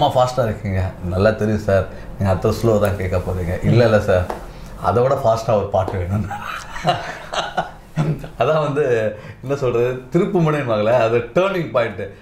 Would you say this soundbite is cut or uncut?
uncut